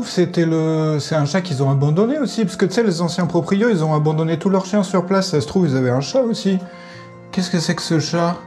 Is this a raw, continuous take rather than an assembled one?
yes; 0 cuts

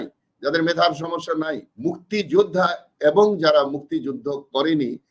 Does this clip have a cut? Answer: yes; 1 cut; at 1.7 s

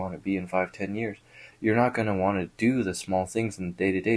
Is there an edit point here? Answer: yes; 1 cut; at 1.4 s

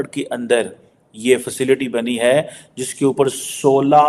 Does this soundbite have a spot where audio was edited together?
no; 0 cuts

